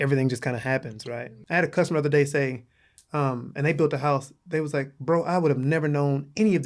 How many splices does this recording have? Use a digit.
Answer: 1